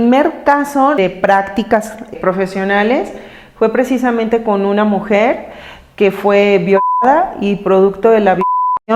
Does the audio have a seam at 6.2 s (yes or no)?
no